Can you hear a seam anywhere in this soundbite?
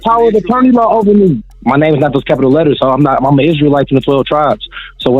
yes; 1 cut; at 1.5 s

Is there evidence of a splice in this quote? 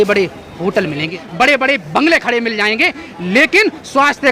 yes; 1 cut; at 1.2 s

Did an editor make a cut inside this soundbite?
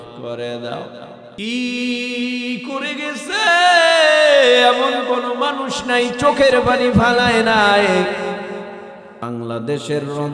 yes; 2 cuts; at 1.2 s, 9.2 s

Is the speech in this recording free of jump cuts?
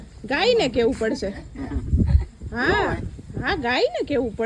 yes; 0 cuts

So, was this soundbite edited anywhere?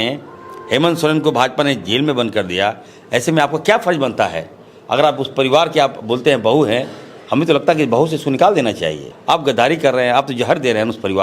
yes; 1 cut; at 9.1 s

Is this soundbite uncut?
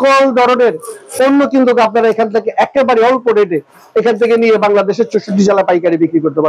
yes; 0 cuts

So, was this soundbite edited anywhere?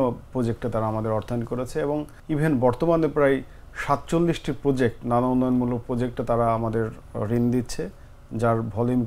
yes; 1 cut; at 2.1 s

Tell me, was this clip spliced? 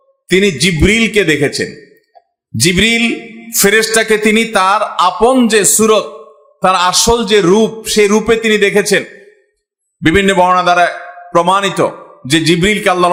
no; 0 cuts

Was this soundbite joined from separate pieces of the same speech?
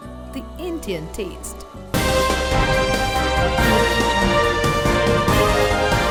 no; 0 cuts

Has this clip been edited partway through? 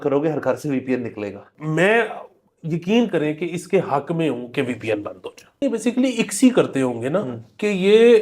yes; 2 cuts; at 1.5 s, 5.6 s

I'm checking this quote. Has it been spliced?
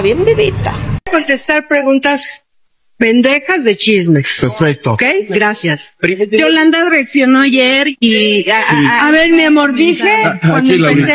yes; 1 cut; at 0.9 s

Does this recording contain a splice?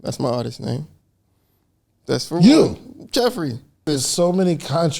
yes; 1 cut; at 3.9 s

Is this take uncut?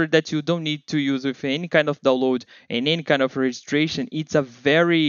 yes; 0 cuts

